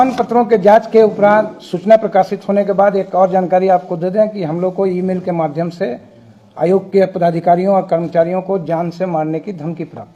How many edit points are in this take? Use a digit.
0